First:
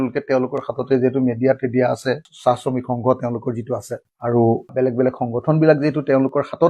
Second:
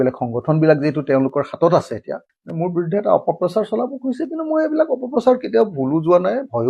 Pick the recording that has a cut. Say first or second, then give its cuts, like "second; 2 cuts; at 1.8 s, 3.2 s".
first; 1 cut; at 4.0 s